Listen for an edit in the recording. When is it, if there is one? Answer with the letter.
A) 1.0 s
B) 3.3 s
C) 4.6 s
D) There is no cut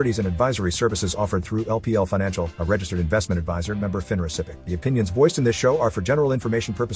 C